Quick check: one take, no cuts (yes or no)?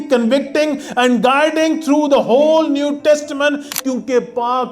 no